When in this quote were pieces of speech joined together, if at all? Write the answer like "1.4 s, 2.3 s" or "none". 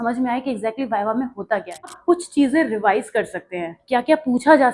2.0 s